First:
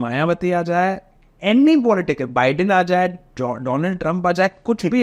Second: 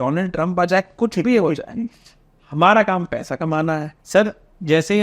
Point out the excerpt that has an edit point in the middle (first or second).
second